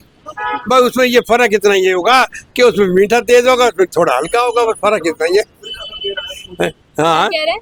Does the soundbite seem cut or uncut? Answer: uncut